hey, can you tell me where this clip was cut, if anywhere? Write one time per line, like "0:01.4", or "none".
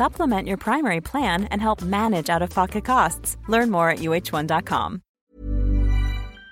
0:05.2